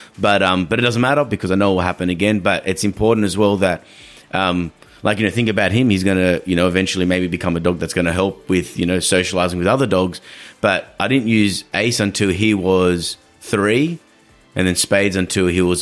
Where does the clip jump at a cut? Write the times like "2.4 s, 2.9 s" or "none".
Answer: none